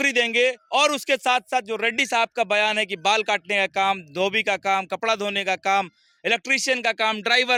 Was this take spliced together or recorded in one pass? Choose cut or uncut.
uncut